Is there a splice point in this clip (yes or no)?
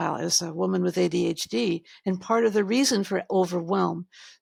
no